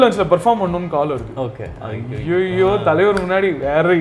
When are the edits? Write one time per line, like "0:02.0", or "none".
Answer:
none